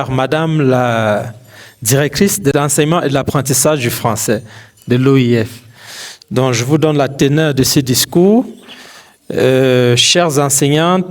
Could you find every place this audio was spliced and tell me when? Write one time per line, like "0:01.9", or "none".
0:02.5